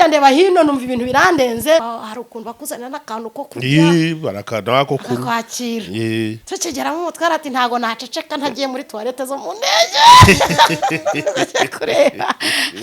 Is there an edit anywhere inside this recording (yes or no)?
yes